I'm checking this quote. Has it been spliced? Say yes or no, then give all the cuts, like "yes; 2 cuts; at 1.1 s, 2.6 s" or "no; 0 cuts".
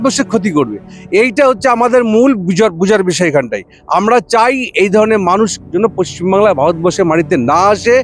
no; 0 cuts